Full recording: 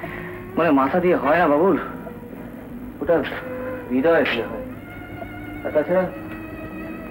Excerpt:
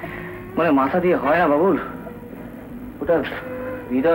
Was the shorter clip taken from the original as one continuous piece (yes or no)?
yes